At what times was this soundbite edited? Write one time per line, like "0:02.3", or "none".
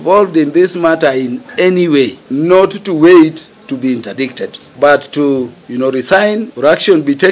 0:02.2
0:04.6
0:05.6
0:06.5